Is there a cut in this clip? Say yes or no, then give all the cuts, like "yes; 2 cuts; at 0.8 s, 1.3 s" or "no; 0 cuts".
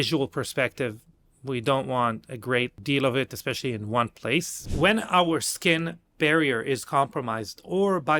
yes; 2 cuts; at 2.8 s, 4.6 s